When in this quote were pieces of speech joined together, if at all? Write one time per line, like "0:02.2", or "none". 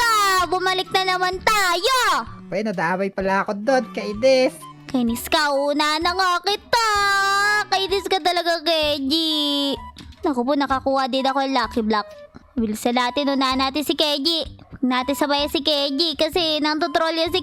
none